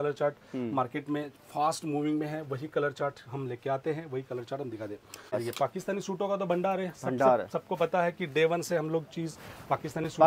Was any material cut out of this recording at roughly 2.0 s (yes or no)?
no